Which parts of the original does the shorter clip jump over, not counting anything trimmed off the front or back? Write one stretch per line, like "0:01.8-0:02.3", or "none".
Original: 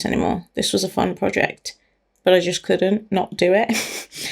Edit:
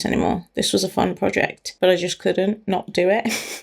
0:01.6-0:02.1